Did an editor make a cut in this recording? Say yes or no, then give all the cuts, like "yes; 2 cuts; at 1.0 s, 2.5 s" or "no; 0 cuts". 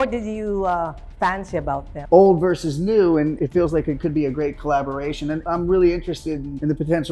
yes; 3 cuts; at 1.8 s, 3.4 s, 5.4 s